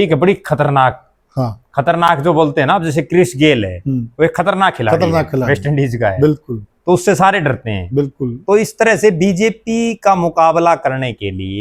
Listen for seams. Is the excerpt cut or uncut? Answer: uncut